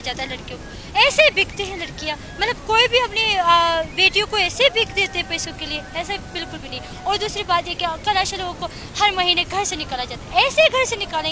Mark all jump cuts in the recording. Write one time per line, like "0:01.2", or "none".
none